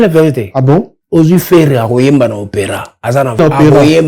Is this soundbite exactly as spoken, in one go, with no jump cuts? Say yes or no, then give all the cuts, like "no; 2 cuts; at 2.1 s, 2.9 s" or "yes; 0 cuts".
no; 2 cuts; at 1.0 s, 3.4 s